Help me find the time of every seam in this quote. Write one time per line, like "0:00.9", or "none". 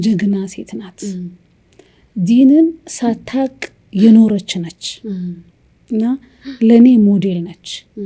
none